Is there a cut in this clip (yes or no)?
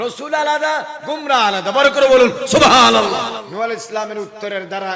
yes